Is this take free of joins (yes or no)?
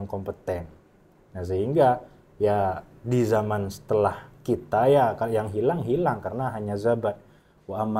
yes